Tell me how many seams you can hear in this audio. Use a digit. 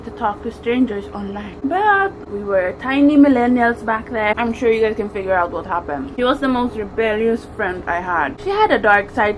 5